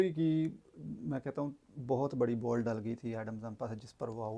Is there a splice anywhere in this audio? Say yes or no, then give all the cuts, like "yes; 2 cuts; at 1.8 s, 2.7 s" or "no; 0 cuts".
no; 0 cuts